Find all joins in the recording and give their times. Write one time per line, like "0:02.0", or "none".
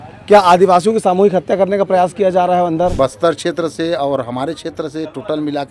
0:02.9